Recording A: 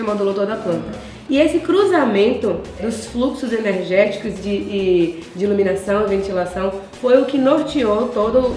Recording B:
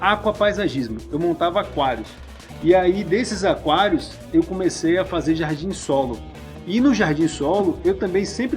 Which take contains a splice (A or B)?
A